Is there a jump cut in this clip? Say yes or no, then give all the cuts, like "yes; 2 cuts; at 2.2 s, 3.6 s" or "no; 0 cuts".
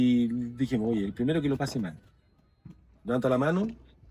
no; 0 cuts